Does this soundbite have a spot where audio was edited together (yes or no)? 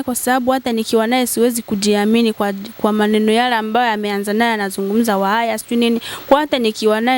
no